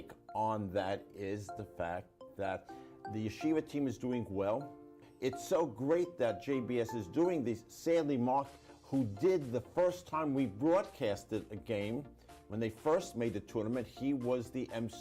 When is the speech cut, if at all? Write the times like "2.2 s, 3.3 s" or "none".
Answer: 5.1 s

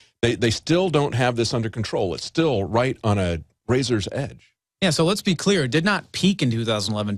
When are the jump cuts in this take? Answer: none

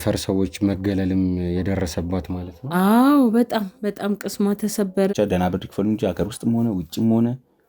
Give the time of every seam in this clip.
5.1 s

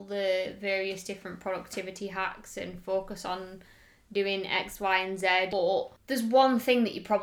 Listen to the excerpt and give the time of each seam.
5.6 s

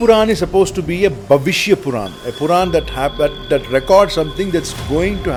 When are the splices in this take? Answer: none

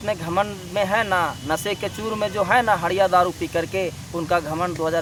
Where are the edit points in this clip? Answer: none

